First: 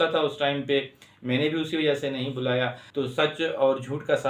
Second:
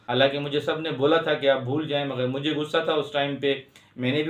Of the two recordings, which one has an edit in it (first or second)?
first